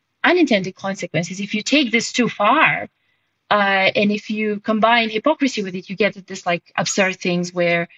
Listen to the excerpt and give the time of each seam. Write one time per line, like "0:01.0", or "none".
none